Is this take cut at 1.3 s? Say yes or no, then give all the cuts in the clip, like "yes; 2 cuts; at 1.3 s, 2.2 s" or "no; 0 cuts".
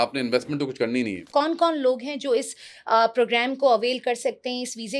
yes; 1 cut; at 1.3 s